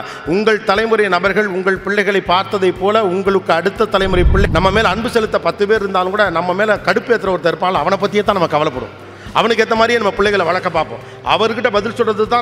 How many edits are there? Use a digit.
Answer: 1